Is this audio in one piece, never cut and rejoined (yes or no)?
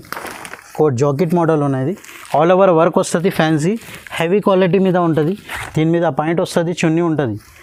yes